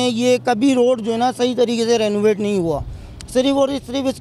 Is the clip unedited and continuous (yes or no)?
yes